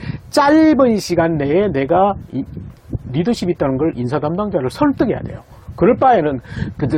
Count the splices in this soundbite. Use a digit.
0